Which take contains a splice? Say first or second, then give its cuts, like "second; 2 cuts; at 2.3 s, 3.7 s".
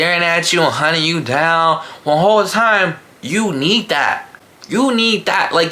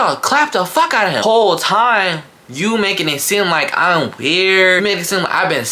second; 2 cuts; at 1.2 s, 4.8 s